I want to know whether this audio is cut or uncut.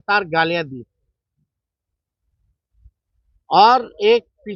uncut